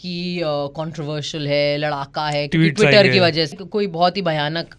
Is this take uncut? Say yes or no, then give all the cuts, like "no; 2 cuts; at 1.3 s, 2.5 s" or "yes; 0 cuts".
no; 1 cut; at 3.6 s